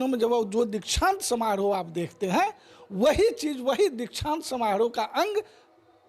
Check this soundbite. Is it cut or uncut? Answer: uncut